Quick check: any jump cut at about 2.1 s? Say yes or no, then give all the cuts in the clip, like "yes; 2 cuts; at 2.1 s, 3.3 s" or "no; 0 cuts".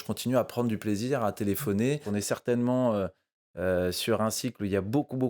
yes; 1 cut; at 2.1 s